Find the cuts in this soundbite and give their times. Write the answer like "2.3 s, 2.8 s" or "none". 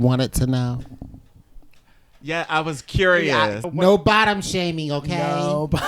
3.7 s

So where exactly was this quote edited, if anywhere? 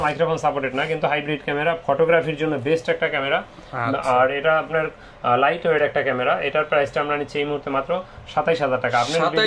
none

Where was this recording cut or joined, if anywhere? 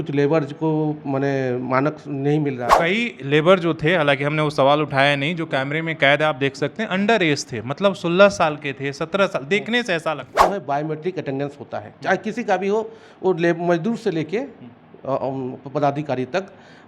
2.7 s, 10.4 s

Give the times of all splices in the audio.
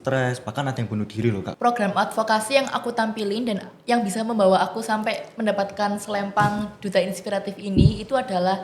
1.5 s

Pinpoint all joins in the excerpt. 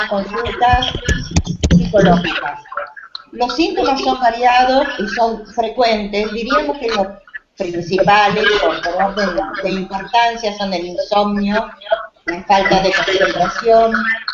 8.3 s

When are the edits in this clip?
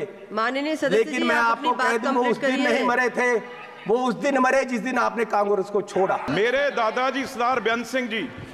6.3 s

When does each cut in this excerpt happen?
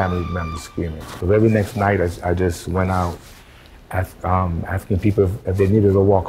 1.1 s

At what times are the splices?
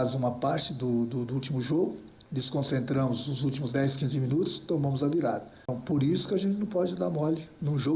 5.7 s

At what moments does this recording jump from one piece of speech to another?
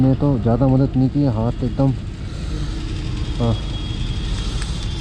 none

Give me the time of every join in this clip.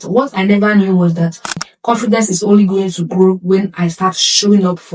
1.7 s

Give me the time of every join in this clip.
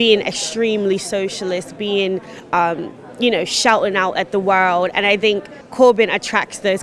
5.6 s

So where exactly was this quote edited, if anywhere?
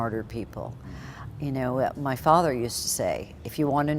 none

